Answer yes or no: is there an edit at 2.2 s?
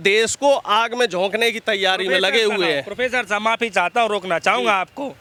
no